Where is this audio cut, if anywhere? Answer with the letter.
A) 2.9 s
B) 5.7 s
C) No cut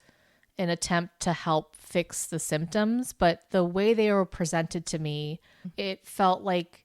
B